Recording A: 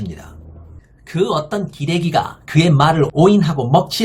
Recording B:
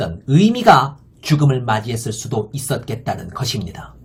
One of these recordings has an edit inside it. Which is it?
A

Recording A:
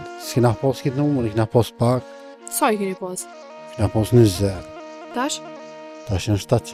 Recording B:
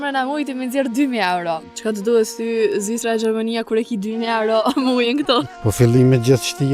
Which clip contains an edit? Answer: B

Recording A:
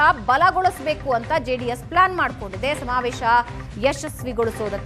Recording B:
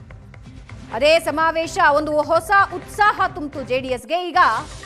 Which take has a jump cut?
B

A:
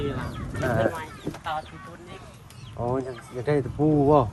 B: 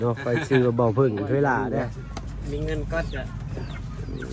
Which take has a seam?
B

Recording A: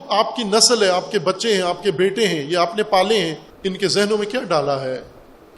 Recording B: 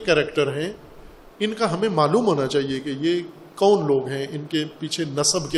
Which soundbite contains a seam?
A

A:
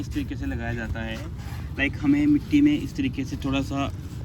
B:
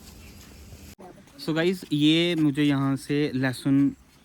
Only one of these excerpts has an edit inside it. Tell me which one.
B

